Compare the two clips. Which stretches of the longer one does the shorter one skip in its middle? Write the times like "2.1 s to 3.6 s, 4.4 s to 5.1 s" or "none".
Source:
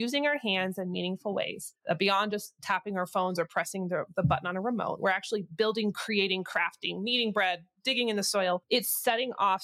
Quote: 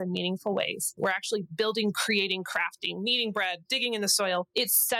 1.8 s to 5.0 s, 7.7 s to 7.8 s